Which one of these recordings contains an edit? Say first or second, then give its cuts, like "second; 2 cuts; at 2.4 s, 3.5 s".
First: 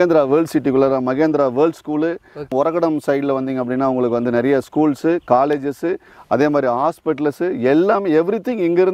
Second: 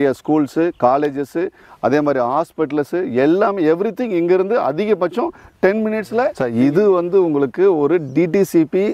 second; 1 cut; at 6.3 s